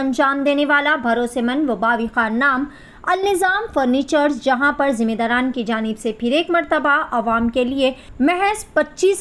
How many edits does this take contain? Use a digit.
1